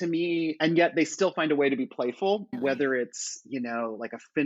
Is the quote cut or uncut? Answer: cut